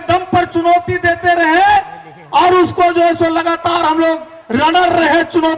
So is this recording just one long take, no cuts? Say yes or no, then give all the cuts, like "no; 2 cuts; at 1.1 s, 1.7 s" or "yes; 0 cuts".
yes; 0 cuts